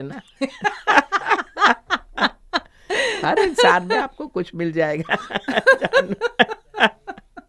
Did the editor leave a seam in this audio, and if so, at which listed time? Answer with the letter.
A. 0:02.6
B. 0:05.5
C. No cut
C